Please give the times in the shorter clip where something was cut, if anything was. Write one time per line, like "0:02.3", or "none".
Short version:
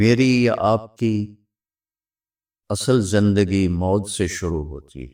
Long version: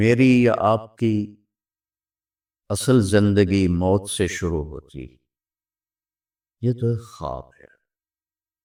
none